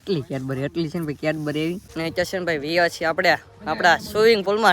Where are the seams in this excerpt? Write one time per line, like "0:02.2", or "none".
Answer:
0:01.9